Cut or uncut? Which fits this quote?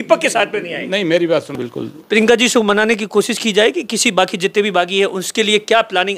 cut